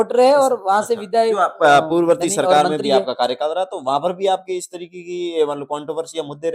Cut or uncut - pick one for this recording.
cut